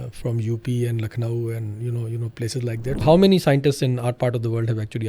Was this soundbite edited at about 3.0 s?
yes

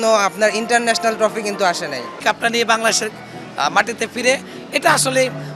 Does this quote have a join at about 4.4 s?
no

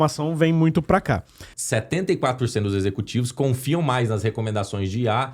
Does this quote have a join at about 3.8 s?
no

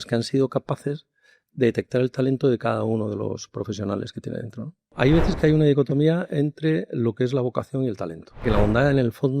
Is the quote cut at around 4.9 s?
yes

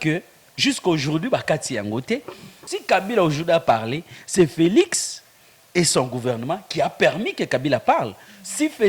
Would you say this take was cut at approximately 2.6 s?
yes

